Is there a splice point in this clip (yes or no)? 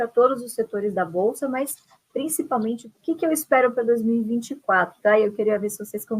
yes